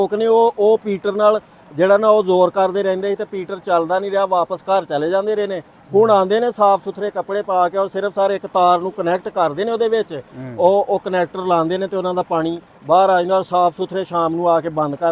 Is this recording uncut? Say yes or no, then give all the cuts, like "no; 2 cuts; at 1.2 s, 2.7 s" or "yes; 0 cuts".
yes; 0 cuts